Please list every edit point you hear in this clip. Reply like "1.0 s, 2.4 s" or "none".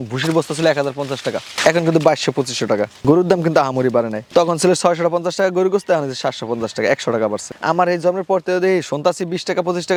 none